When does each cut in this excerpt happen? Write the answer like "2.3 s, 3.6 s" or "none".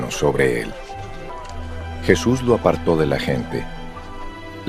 1.3 s